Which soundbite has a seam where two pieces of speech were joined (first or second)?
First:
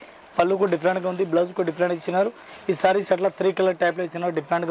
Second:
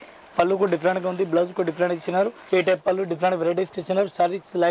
second